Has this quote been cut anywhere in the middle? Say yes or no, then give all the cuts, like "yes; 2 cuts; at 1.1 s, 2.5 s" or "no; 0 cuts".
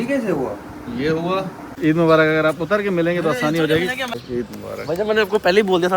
yes; 2 cuts; at 1.7 s, 4.2 s